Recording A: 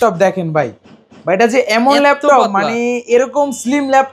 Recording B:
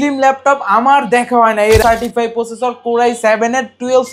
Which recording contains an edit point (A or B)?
B